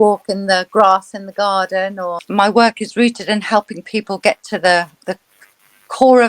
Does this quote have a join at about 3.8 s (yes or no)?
no